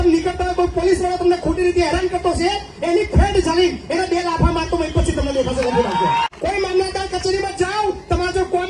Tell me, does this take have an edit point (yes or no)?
yes